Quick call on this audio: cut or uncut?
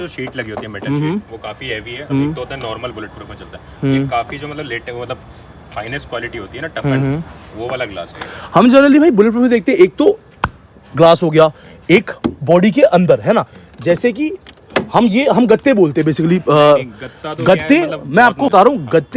uncut